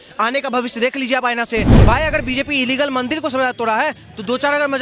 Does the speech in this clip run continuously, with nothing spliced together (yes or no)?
no